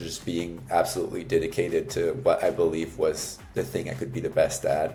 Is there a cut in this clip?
no; 0 cuts

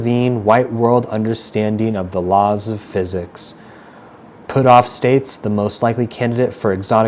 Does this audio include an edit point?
no; 0 cuts

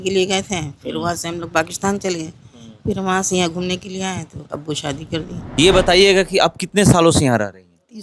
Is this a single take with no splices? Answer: no; 1 cut; at 5.4 s

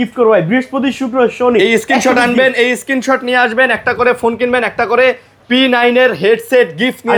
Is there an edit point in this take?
no; 0 cuts

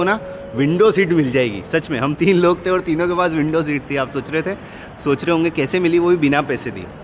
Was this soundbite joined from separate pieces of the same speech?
no; 0 cuts

